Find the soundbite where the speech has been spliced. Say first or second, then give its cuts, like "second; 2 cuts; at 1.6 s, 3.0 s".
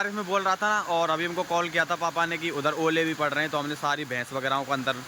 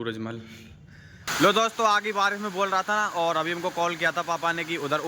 second; 1 cut; at 1.3 s